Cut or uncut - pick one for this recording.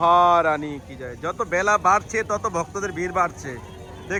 uncut